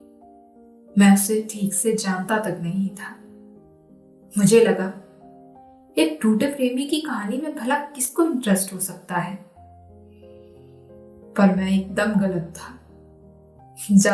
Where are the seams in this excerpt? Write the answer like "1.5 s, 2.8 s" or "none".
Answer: none